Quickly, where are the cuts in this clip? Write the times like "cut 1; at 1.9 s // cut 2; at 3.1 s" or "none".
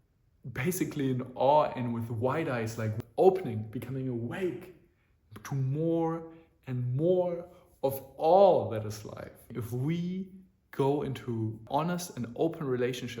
cut 1; at 2.9 s // cut 2; at 9.5 s // cut 3; at 11.6 s